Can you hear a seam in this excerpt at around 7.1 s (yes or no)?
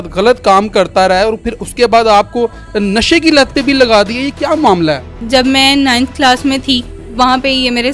yes